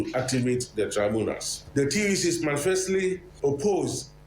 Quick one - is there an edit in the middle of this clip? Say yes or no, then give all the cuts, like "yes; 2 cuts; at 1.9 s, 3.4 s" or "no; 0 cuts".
yes; 2 cuts; at 1.5 s, 3.3 s